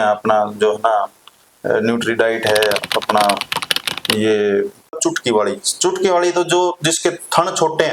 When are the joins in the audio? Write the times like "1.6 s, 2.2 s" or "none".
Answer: 5.0 s